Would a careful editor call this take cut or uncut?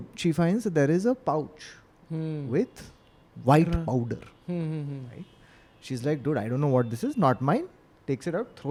uncut